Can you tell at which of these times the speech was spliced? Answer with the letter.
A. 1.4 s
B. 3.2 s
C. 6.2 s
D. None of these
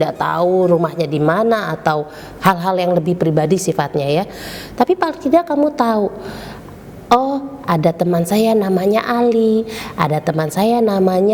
D